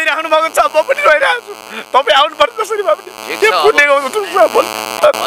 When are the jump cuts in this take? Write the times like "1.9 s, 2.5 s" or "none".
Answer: none

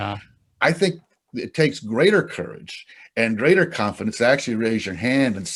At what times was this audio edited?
none

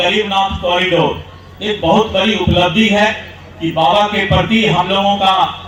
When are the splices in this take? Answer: none

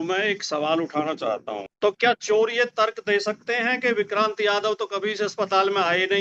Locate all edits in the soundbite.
1.6 s

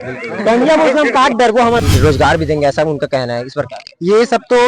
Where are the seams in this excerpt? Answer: 1.8 s

